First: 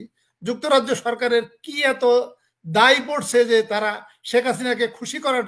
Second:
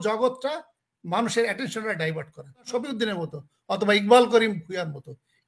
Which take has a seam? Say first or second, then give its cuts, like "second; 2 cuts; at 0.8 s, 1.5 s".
second; 1 cut; at 2.7 s